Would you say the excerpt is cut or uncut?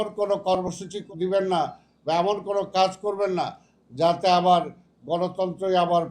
cut